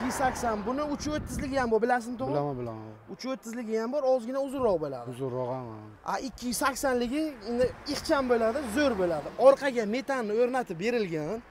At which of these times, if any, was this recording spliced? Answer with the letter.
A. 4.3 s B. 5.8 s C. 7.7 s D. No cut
D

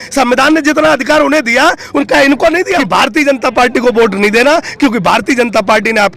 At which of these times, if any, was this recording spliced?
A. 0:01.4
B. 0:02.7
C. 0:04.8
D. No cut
B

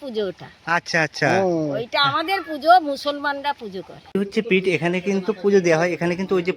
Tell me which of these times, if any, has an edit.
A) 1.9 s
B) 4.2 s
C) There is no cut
B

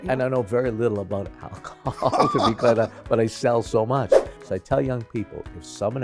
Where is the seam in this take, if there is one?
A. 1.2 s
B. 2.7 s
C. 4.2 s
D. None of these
C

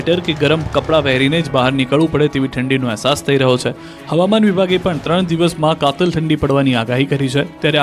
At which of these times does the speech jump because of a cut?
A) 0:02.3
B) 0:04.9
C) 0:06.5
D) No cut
A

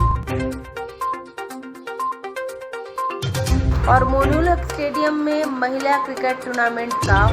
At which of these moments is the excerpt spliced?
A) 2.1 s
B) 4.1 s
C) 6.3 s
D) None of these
A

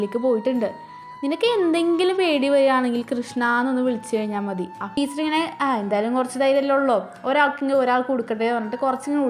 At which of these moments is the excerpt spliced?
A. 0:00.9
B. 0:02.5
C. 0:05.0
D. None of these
C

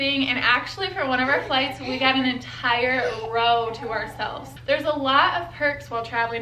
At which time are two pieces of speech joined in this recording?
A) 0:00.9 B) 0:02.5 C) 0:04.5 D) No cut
C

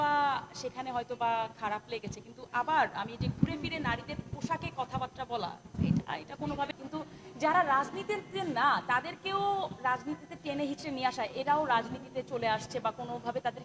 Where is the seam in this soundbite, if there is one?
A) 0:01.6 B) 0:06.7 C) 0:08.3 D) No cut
B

